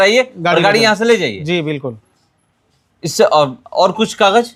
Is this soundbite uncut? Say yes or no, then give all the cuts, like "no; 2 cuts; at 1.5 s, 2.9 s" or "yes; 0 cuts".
yes; 0 cuts